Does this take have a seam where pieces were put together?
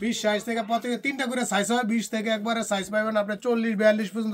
no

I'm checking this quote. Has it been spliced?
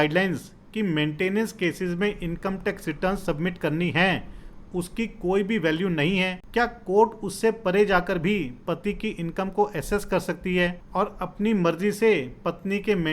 yes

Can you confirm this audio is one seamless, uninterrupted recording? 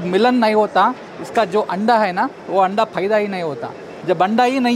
yes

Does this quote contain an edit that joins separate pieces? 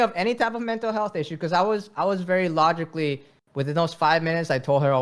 no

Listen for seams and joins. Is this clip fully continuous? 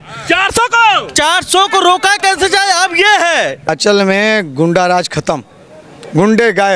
no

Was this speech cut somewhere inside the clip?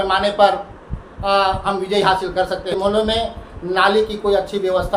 yes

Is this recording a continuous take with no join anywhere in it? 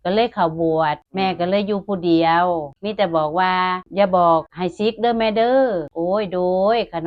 no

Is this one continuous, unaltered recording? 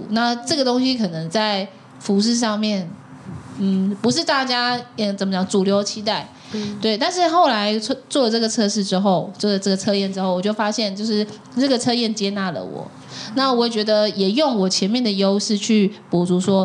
yes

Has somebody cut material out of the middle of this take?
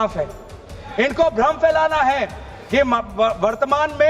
no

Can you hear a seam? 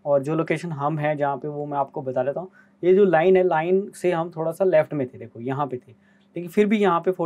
no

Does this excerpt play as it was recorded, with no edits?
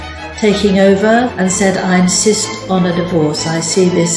no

